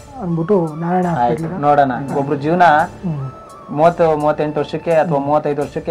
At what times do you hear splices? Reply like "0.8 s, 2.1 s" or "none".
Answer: 2.1 s